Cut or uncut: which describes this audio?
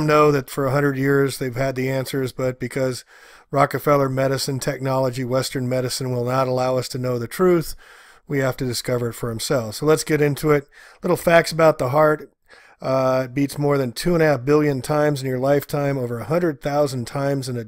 cut